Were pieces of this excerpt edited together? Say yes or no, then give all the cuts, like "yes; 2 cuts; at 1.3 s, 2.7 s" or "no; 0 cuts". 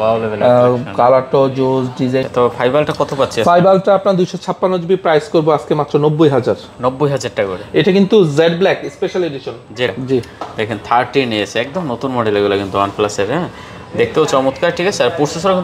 yes; 2 cuts; at 2.3 s, 9.9 s